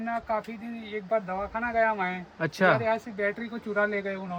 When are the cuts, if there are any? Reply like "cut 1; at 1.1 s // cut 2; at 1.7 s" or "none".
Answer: none